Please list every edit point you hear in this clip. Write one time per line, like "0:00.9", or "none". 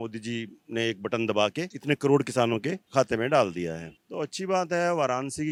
none